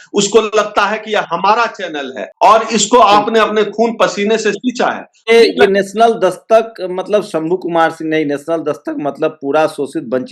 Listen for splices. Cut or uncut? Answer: cut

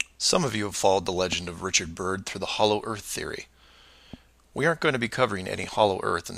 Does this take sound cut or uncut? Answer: cut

